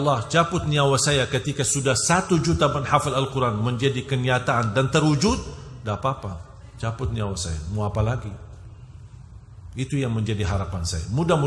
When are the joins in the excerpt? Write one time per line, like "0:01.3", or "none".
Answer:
none